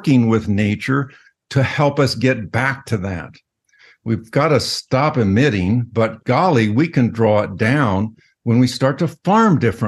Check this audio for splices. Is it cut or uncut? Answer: uncut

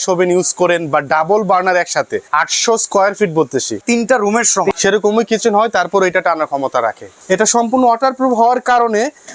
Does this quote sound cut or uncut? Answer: cut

